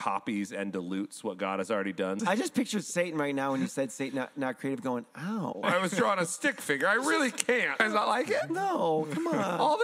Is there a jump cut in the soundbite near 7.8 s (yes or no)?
yes